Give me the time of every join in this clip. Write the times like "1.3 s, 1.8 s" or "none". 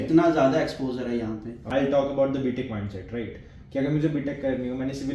1.6 s

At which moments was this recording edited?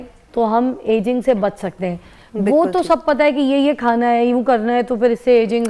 none

